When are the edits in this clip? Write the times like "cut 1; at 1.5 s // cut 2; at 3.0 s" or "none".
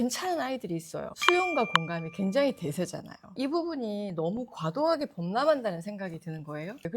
cut 1; at 1.1 s

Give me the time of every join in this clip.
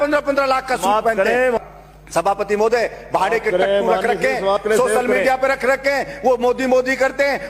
cut 1; at 1.6 s

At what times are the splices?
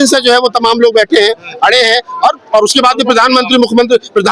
none

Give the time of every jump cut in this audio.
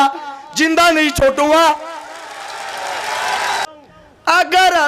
cut 1; at 3.7 s

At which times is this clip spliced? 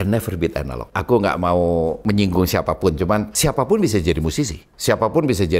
cut 1; at 0.9 s // cut 2; at 2.0 s // cut 3; at 3.3 s // cut 4; at 4.6 s

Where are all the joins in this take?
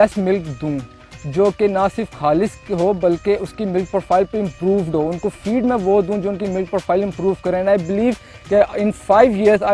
none

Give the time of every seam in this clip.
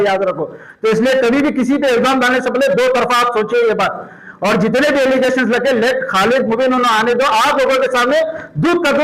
none

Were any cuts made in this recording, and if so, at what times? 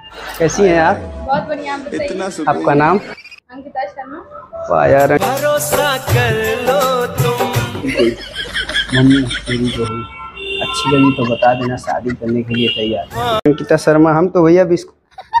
cut 1; at 7.8 s // cut 2; at 13.2 s

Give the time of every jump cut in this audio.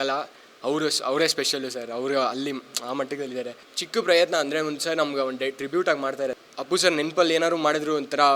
cut 1; at 3.7 s // cut 2; at 6.4 s

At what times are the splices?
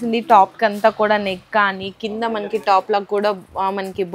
none

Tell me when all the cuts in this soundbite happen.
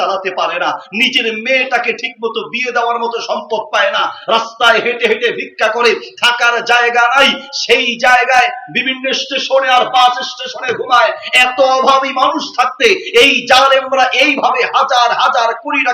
none

